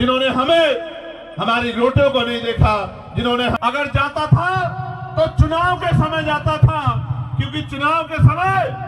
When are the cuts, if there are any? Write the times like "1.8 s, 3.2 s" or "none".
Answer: 3.6 s